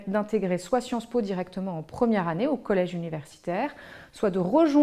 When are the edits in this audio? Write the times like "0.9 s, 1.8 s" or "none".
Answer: 2.3 s